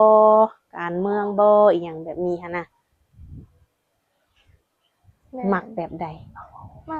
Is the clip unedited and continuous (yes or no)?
yes